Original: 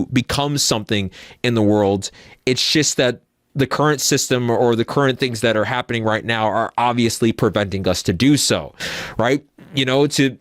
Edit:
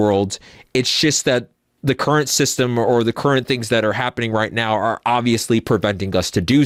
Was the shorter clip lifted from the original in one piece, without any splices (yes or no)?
yes